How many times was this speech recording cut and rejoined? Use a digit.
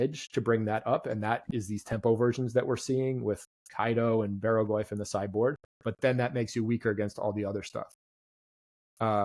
0